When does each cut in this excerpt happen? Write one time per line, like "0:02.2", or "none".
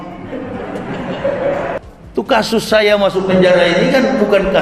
0:01.8